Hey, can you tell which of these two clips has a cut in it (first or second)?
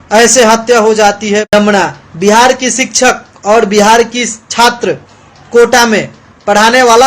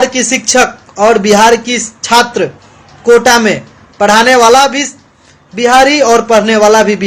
first